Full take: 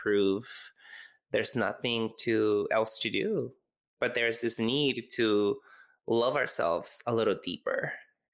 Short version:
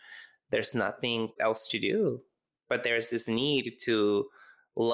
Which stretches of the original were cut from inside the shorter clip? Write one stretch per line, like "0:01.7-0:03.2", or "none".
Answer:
0:02.2-0:02.7